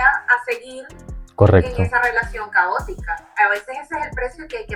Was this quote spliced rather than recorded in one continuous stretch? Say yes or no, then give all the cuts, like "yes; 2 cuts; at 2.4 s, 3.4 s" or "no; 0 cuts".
no; 0 cuts